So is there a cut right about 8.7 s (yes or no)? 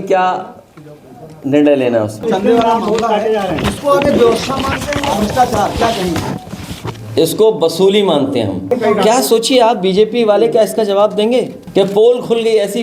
yes